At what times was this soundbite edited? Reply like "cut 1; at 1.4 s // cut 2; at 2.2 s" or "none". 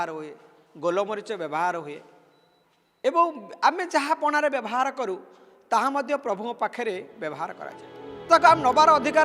cut 1; at 8.2 s

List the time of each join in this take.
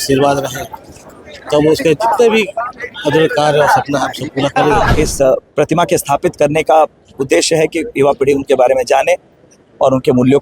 cut 1; at 4.9 s

